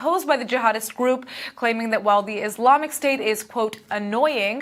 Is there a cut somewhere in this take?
no; 0 cuts

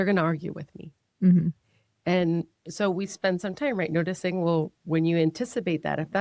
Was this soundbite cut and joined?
no; 0 cuts

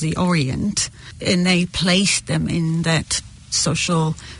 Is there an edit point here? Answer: yes; 1 cut; at 1.2 s

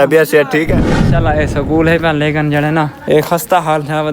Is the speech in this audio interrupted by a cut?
yes; 2 cuts; at 1.0 s, 3.0 s

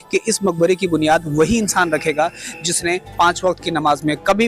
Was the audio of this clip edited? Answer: no; 0 cuts

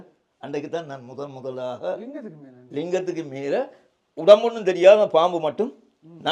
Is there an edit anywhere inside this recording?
no; 0 cuts

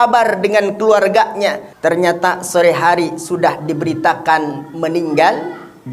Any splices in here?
yes; 1 cut; at 1.7 s

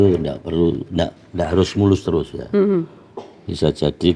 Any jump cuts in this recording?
no; 0 cuts

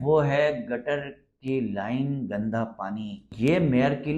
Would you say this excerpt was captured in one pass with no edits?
no; 1 cut; at 3.2 s

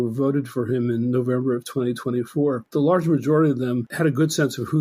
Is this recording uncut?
no; 2 cuts; at 2.6 s, 3.9 s

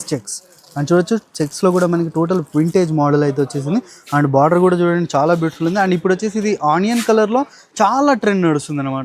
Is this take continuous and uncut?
yes; 0 cuts

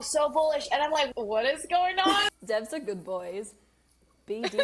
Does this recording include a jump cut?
yes; 2 cuts; at 1.1 s, 2.3 s

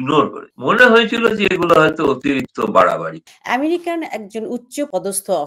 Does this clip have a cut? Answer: yes; 1 cut; at 3.2 s

